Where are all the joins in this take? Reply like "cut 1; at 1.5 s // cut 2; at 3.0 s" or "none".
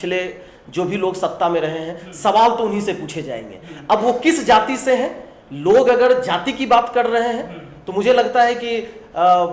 none